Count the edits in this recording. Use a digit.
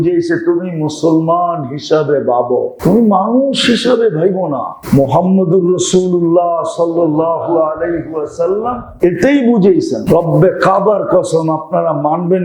4